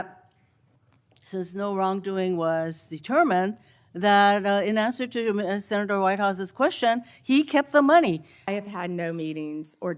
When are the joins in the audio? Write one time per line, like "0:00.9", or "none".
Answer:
0:08.5